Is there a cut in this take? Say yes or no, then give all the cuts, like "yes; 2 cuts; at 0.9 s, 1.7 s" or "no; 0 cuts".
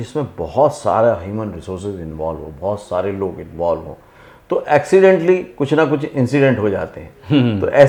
no; 0 cuts